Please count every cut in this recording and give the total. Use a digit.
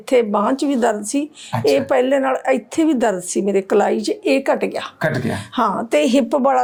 0